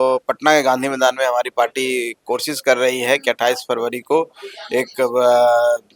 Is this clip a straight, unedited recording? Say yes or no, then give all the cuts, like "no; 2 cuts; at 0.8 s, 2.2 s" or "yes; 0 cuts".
yes; 0 cuts